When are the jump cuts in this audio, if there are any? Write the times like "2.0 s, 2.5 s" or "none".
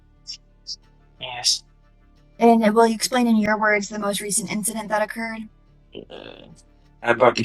5.7 s